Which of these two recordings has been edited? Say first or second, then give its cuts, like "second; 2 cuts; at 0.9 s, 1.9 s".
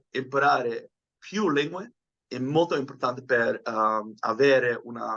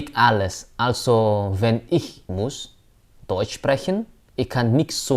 second; 2 cuts; at 2.2 s, 4.2 s